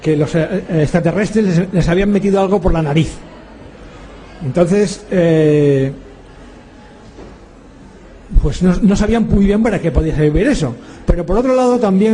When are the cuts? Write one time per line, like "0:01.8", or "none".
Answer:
0:07.0

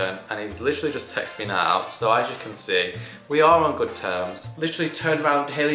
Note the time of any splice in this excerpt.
0:04.5

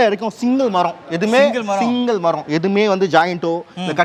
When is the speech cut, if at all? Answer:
none

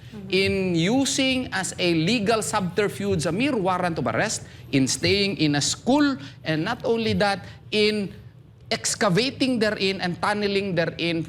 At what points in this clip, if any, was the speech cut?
none

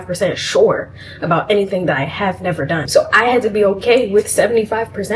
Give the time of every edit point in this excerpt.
0:02.8

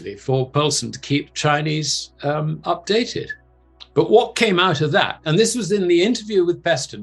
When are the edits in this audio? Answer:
none

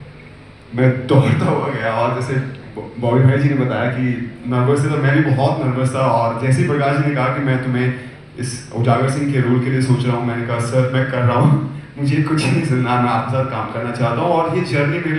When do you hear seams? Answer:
none

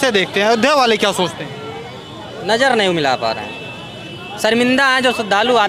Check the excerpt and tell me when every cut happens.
none

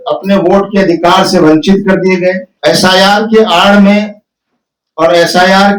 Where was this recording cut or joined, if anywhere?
0:02.5

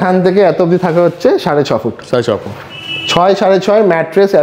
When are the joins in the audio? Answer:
none

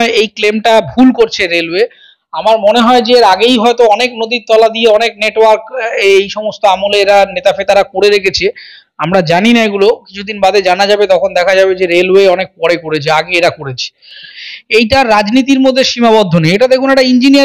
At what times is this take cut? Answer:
0:14.3

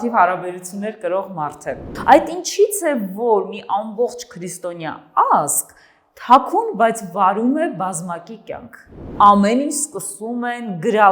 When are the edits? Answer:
0:01.9
0:09.0

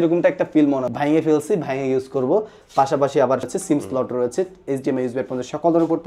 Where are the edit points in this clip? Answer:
0:00.9
0:03.5

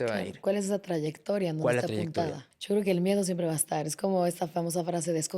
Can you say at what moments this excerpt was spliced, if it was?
0:02.5

